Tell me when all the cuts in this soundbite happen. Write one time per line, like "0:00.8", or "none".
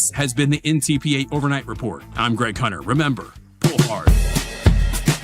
0:03.6